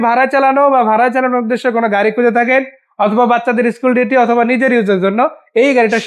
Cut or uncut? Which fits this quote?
uncut